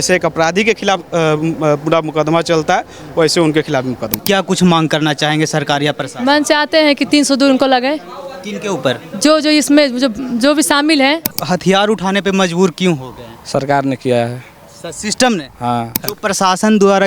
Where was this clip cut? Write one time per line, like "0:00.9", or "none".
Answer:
0:04.2
0:11.3
0:16.0